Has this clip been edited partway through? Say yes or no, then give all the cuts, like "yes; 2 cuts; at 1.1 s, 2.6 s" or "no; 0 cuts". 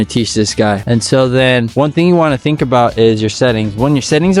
yes; 2 cuts; at 0.8 s, 1.7 s